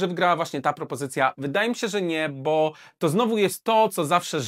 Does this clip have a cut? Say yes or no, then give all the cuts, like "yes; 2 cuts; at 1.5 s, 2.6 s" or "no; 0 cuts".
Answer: no; 0 cuts